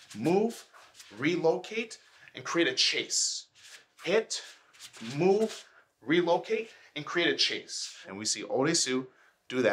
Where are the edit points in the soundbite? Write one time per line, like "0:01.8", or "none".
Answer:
0:08.1

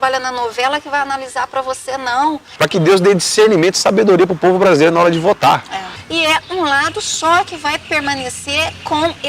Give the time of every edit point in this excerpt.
0:02.5
0:05.9

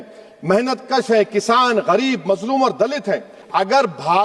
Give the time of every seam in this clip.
0:03.3

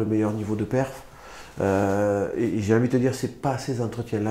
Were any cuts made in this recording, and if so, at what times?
none

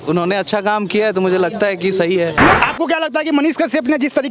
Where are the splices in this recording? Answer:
0:02.6

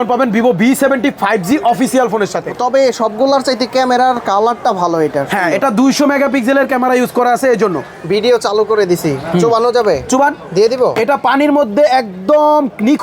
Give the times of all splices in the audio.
0:02.5
0:08.0

